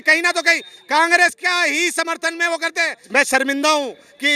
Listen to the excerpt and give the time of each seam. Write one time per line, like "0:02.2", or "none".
0:02.9